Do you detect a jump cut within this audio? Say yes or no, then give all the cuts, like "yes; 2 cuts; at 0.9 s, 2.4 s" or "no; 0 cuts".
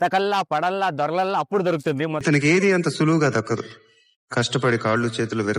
yes; 1 cut; at 2.2 s